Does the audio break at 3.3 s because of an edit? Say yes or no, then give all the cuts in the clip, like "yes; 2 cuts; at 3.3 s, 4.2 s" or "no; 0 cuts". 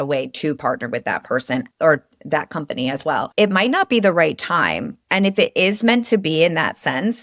yes; 1 cut; at 3.3 s